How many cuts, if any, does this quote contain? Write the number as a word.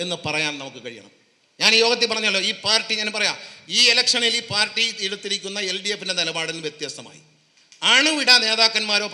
zero